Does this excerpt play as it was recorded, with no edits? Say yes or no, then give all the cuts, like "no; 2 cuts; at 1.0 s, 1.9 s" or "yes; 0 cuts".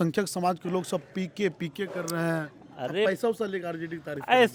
yes; 0 cuts